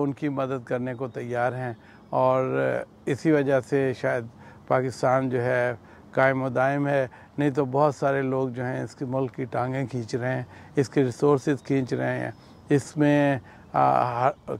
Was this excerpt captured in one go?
yes; 0 cuts

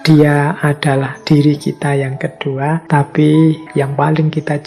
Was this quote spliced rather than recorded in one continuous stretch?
yes; 2 cuts; at 2.8 s, 3.6 s

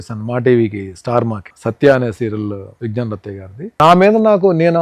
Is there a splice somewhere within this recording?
yes; 2 cuts; at 2.7 s, 3.8 s

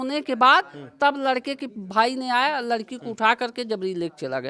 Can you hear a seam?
no; 0 cuts

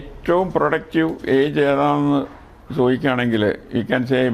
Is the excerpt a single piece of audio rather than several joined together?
yes; 0 cuts

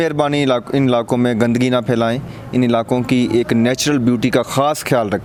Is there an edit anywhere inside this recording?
no; 0 cuts

